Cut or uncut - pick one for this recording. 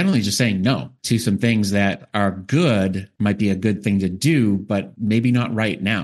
cut